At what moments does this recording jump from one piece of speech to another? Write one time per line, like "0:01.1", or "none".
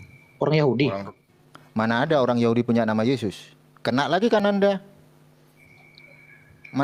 none